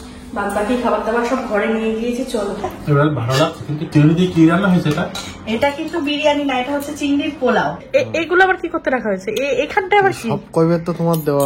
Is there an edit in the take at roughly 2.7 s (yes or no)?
yes